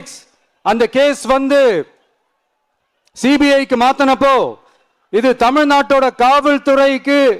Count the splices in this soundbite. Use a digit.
0